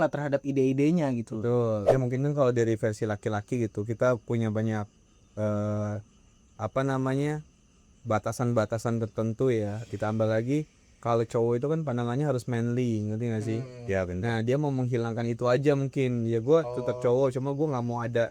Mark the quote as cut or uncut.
cut